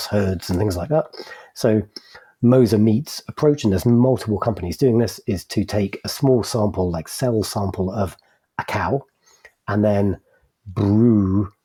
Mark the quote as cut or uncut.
uncut